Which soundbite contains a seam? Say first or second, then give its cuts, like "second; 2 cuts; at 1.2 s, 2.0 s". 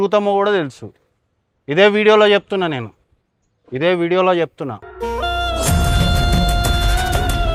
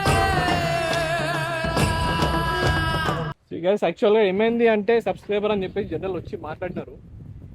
second; 1 cut; at 3.3 s